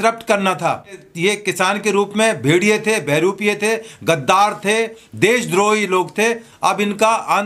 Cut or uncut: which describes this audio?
cut